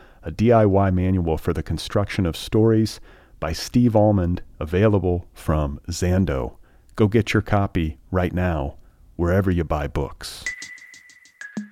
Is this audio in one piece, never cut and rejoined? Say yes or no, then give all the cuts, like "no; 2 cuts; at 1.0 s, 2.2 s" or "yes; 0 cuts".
yes; 0 cuts